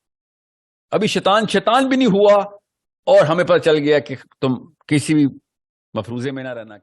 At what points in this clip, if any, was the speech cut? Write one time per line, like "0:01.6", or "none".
none